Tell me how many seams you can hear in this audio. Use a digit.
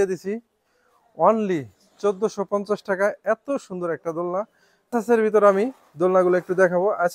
1